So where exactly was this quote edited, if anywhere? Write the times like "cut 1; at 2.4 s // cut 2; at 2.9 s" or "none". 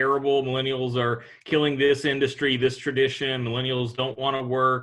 none